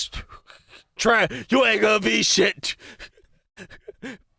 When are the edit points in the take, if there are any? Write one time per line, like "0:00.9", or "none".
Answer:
none